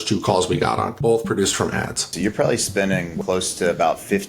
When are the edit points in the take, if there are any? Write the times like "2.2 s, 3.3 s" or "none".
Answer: 0.9 s, 2.1 s, 3.1 s